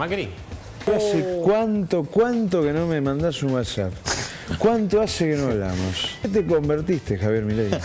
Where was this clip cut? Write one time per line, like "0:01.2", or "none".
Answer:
0:00.9
0:06.3